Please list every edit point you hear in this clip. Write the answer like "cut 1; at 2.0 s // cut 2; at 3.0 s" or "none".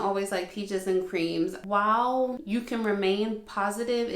cut 1; at 1.6 s // cut 2; at 2.4 s

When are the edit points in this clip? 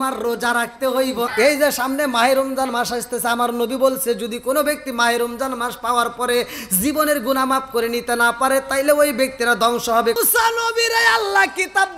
cut 1; at 1.3 s // cut 2; at 10.2 s

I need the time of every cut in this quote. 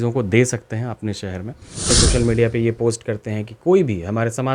cut 1; at 1.8 s

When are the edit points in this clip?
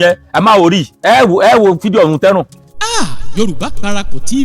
cut 1; at 2.6 s

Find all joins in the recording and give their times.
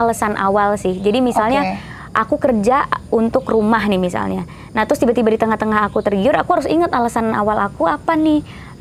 none

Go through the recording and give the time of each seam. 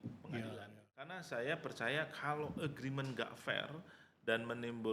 cut 1; at 1.2 s

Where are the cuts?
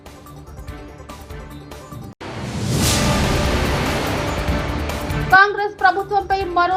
cut 1; at 5.2 s

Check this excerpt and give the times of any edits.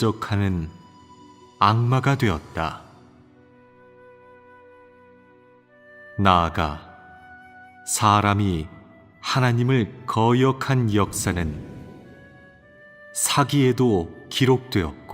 cut 1; at 10.0 s

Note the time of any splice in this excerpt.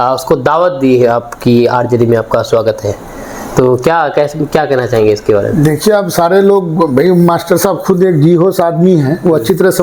none

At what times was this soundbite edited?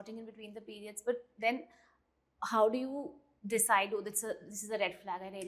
none

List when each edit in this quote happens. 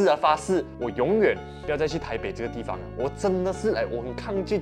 none

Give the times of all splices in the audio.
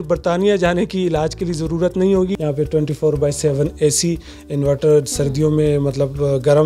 cut 1; at 2.3 s

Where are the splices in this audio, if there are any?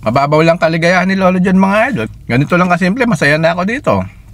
cut 1; at 2.0 s

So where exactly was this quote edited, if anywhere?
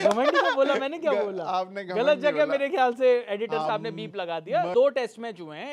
cut 1; at 4.7 s

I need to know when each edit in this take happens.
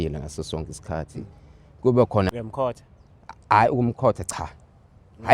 cut 1; at 2.3 s

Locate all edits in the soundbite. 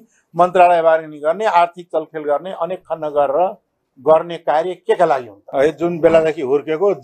cut 1; at 5.4 s

